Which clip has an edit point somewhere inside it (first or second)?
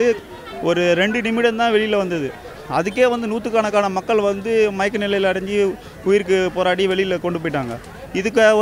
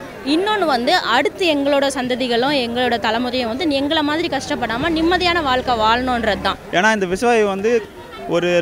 second